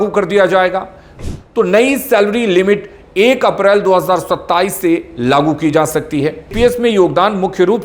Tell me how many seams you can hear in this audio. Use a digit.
2